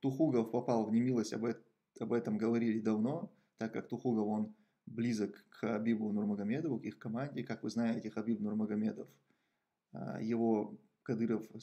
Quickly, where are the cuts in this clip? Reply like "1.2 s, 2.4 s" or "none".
none